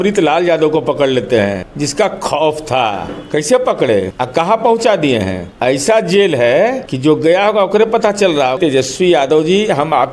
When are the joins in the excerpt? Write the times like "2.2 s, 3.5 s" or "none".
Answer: 1.7 s, 3.1 s, 4.1 s, 5.4 s, 6.9 s, 8.6 s

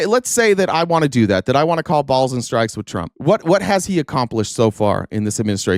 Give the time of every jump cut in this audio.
none

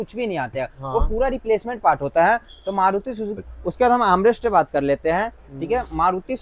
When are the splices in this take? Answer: 3.5 s

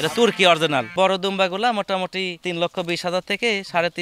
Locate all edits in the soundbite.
0.9 s, 2.4 s

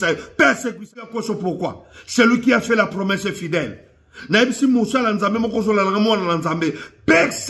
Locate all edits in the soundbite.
1.0 s

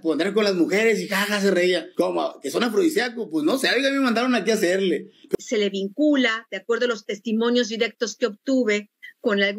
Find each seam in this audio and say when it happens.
5.4 s

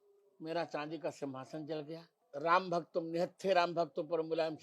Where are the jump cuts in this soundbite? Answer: 2.1 s

